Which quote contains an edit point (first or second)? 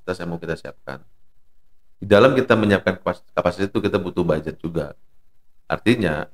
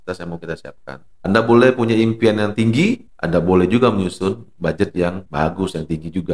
second